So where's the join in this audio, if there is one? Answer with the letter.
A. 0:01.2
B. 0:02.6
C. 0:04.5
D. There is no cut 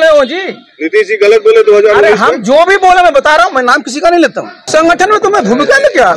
C